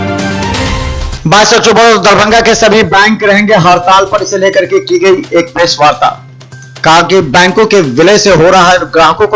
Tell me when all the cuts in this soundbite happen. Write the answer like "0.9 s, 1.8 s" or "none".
1.1 s